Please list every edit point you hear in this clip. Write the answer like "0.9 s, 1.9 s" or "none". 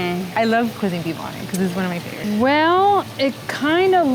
0.8 s, 2.2 s